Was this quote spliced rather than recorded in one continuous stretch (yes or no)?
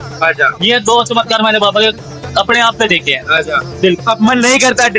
no